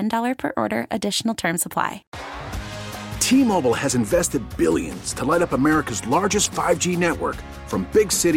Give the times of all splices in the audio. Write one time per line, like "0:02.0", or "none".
0:02.1